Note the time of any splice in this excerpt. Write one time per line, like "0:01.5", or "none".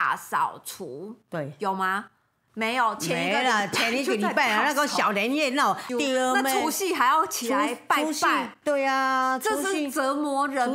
0:05.8